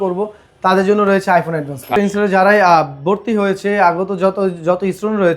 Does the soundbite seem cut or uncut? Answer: cut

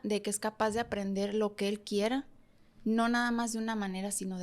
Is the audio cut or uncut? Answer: uncut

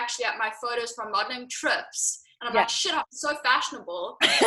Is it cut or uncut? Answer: uncut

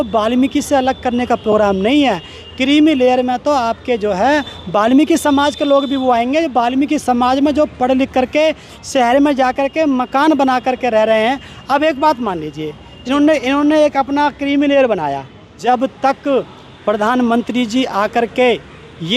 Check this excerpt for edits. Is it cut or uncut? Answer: cut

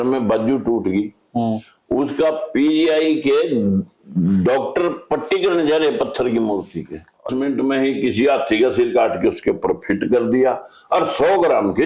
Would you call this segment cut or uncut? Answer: cut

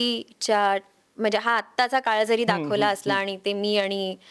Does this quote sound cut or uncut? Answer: uncut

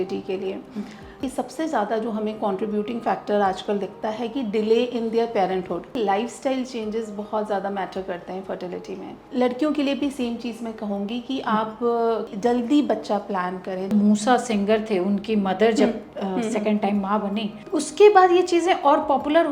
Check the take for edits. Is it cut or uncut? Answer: cut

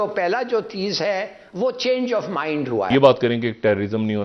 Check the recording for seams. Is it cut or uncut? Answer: cut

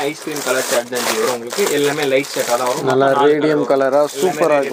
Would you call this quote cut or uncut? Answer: uncut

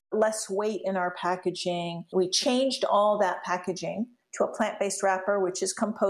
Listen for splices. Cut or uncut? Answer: cut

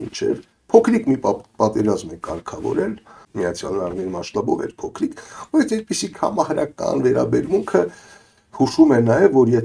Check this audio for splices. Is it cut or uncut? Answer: cut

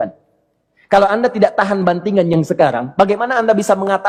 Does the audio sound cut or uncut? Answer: uncut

